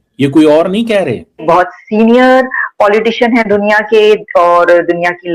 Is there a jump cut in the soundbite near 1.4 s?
yes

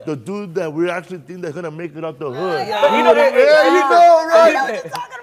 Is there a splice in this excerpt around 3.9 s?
no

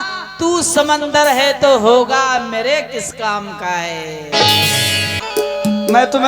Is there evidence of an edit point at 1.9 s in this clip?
no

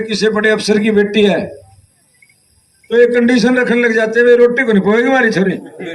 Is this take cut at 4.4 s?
no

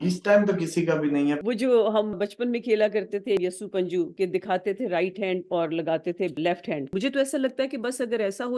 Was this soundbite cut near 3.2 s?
no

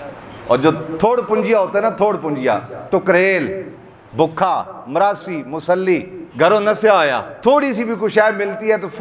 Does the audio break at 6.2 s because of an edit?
yes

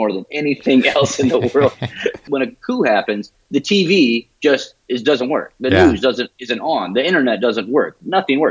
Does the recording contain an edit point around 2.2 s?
yes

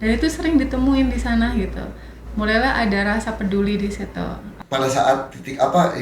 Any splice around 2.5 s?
no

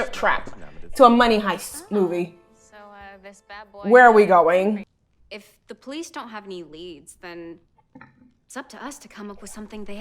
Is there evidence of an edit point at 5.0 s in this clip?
yes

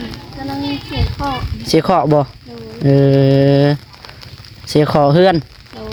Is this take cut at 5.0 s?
no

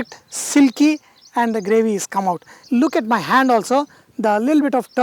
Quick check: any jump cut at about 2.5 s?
yes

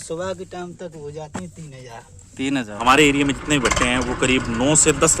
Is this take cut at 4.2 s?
no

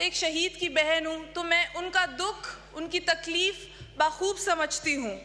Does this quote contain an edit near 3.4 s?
no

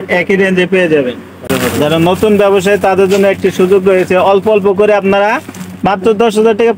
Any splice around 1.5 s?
yes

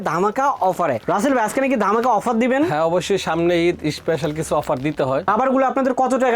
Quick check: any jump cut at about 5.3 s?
yes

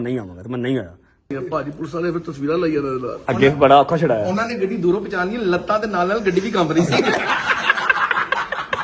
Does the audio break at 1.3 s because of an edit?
yes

